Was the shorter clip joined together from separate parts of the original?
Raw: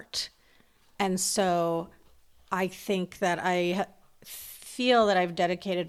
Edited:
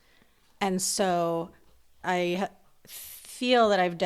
yes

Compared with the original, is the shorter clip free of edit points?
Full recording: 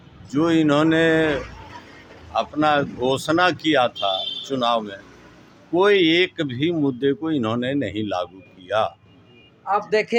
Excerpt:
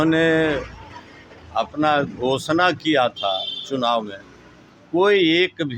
yes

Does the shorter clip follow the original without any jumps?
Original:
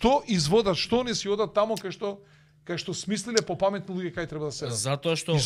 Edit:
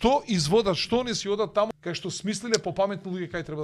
no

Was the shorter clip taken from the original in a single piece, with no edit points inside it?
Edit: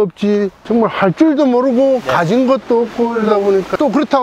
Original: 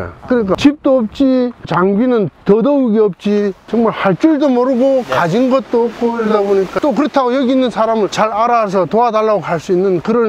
yes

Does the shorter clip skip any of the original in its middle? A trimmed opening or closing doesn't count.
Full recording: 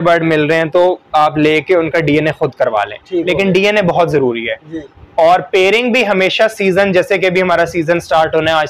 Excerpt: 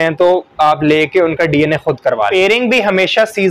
yes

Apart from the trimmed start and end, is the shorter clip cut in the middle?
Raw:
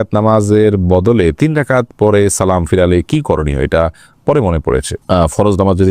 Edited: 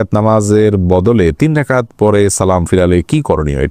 no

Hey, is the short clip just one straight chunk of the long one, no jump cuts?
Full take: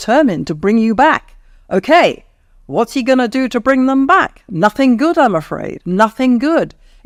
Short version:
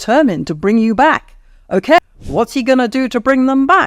no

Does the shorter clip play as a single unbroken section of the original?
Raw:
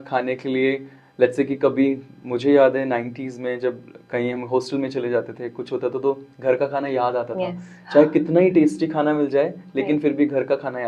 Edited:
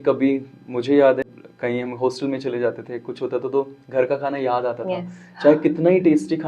no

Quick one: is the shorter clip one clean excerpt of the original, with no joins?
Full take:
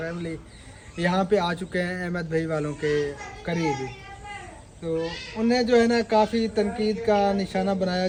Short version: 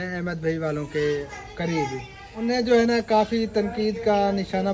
no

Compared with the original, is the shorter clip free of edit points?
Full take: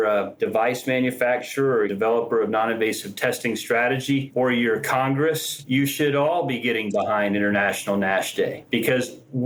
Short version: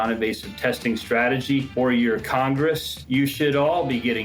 yes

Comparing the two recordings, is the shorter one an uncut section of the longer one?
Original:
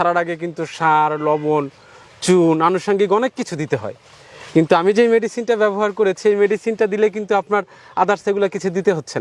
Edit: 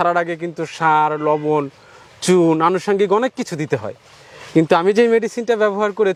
yes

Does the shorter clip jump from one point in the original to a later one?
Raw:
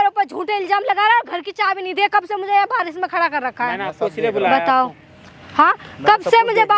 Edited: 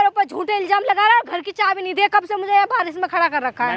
no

